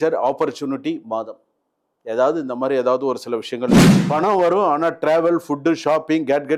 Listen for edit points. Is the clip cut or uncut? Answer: cut